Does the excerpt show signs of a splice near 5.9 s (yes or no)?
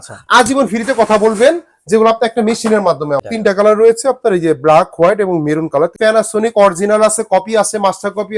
yes